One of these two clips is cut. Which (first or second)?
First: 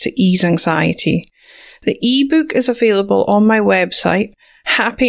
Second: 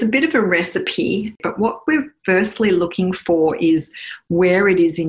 second